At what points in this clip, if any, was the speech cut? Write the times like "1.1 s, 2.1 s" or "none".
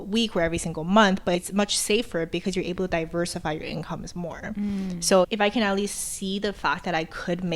5.3 s